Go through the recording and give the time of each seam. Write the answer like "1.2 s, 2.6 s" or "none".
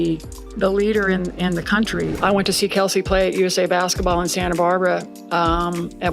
2.1 s